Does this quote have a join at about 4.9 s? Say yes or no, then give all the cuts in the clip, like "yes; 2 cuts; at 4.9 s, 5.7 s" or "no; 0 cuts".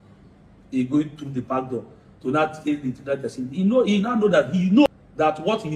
yes; 1 cut; at 4.9 s